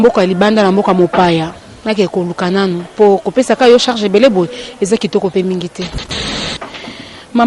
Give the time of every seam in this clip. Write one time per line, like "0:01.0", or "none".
0:06.2